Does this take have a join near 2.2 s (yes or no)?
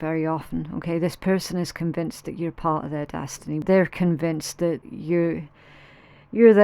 no